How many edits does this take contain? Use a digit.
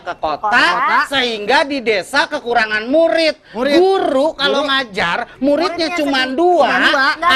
0